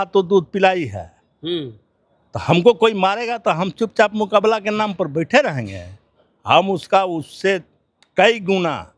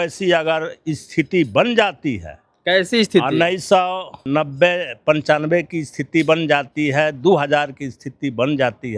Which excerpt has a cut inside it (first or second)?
second